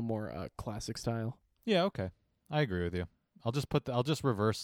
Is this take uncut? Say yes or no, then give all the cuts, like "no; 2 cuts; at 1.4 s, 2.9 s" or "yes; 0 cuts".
no; 1 cut; at 1.5 s